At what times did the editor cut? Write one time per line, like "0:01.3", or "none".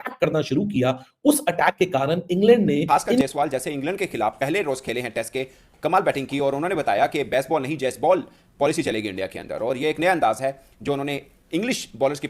0:03.0